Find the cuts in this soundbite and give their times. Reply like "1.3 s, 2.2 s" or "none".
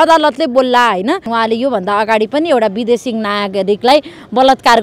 1.3 s